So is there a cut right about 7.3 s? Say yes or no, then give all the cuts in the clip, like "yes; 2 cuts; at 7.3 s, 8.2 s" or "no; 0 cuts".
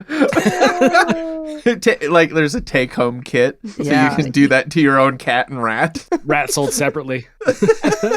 yes; 3 cuts; at 1.4 s, 6.0 s, 7.3 s